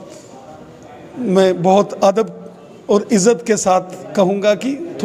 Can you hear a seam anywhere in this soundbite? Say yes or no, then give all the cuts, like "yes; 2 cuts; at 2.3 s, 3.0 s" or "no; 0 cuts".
no; 0 cuts